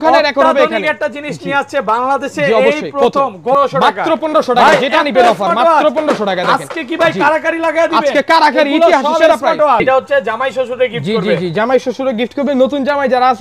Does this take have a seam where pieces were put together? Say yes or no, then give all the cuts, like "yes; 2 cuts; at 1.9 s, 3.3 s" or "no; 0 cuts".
yes; 2 cuts; at 3.6 s, 9.8 s